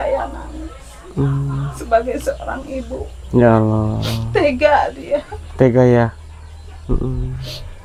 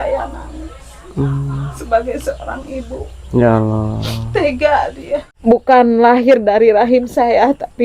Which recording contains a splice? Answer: second; 1 cut; at 5.3 s

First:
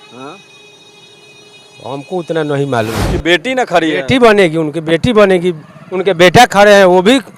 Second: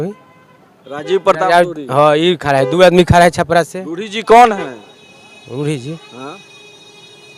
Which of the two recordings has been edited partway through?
first; 1 cut; at 3.1 s

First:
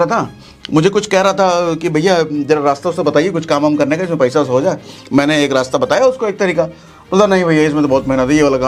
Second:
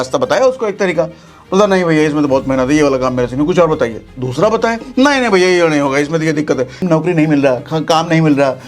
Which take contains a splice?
second; 1 cut; at 6.8 s

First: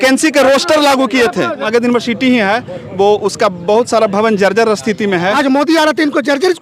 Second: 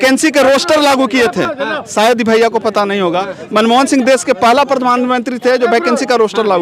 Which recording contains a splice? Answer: first; 2 cuts; at 1.6 s, 5.4 s

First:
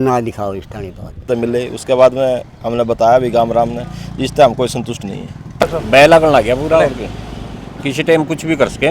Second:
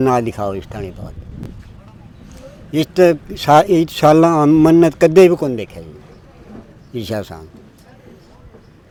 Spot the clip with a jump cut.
first; 2 cuts; at 1.2 s, 5.6 s

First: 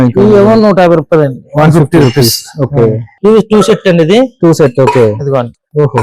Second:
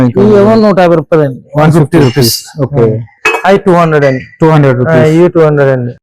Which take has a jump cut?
first; 1 cut; at 3.1 s

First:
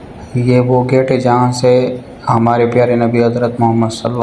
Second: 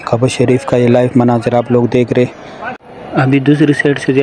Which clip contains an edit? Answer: second; 1 cut; at 2.8 s

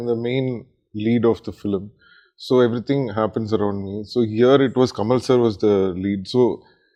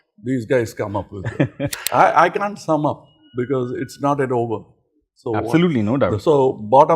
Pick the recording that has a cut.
second; 1 cut; at 1.7 s

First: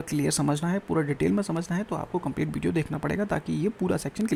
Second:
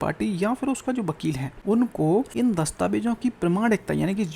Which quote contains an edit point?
second; 2 cuts; at 1.5 s, 2.3 s

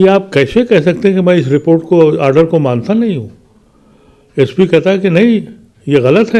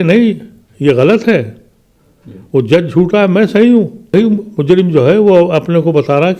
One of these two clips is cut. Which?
second; 1 cut; at 4.1 s

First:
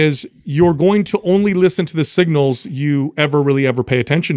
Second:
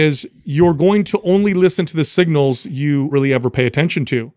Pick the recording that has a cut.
second; 1 cut; at 3.1 s

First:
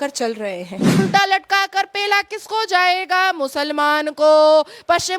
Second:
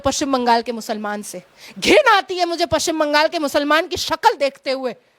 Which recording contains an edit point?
first; 1 cut; at 1.0 s

